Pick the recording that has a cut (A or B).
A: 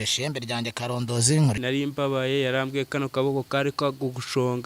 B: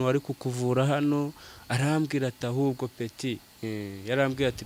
A